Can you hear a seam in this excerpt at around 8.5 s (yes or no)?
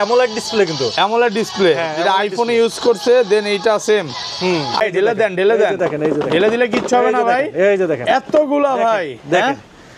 no